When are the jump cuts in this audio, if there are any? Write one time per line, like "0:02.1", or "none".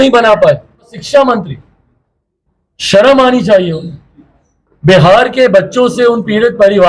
0:01.0